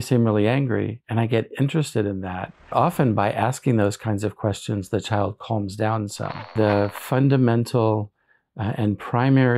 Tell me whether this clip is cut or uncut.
cut